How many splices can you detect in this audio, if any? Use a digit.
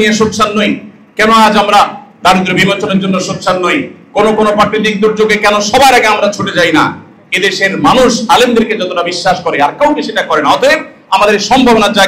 0